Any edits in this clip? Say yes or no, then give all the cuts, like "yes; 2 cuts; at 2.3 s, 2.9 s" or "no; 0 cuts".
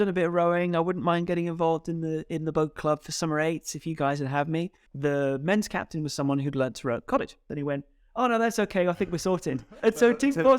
yes; 3 cuts; at 4.8 s, 7.4 s, 9.8 s